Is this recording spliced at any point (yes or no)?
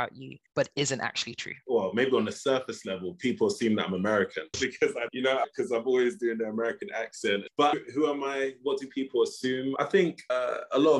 yes